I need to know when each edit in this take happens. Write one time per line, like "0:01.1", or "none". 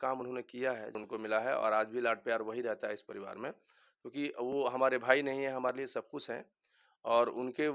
0:01.0